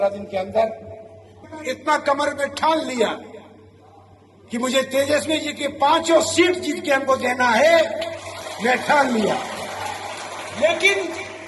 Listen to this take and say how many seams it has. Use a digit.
1